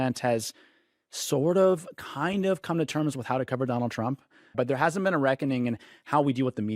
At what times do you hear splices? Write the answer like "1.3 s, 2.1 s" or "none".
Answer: 4.5 s

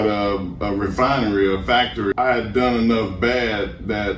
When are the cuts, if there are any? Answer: 2.1 s

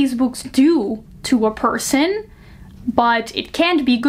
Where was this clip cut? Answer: none

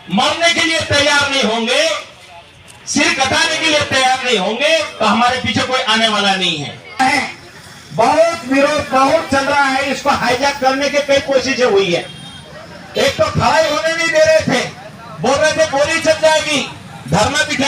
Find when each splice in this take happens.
7.0 s

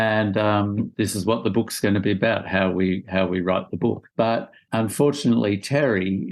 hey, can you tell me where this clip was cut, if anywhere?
0.9 s, 4.2 s

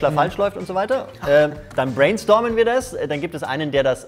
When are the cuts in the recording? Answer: none

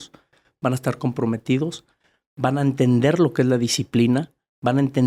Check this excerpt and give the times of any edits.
none

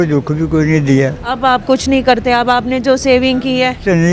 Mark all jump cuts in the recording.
1.2 s

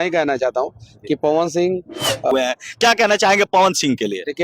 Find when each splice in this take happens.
2.3 s

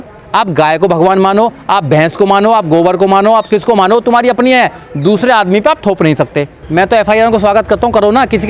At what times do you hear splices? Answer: 6.5 s

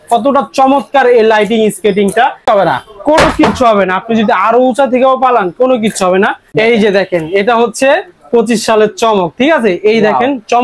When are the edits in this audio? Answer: 2.4 s, 6.4 s

